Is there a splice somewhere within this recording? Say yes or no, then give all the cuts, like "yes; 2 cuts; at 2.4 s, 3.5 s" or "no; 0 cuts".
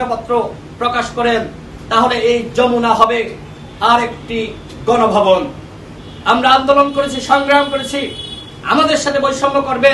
no; 0 cuts